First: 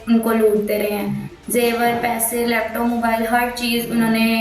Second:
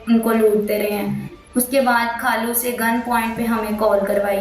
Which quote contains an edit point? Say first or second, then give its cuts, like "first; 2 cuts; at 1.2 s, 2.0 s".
second; 1 cut; at 1.3 s